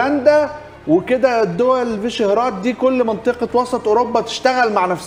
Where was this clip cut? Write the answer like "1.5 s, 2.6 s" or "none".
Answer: none